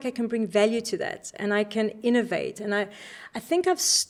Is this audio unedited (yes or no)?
yes